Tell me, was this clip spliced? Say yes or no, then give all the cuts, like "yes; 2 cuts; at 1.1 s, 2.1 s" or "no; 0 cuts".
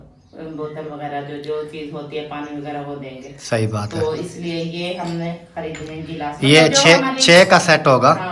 no; 0 cuts